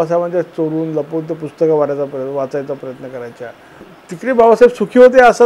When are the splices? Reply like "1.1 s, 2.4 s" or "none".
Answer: 4.0 s